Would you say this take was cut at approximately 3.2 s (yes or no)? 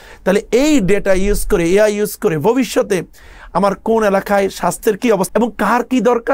no